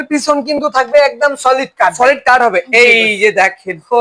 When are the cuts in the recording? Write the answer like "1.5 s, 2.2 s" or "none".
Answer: none